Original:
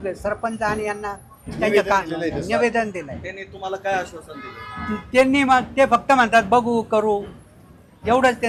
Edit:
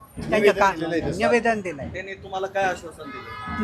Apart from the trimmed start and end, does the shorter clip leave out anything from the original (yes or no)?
no